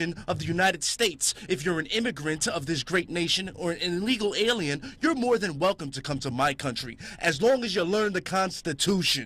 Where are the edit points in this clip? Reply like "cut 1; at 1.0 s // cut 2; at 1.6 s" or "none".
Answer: cut 1; at 3.9 s